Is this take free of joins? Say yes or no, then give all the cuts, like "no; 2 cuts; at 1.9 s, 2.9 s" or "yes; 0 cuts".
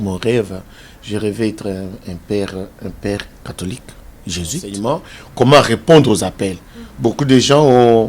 no; 1 cut; at 4.7 s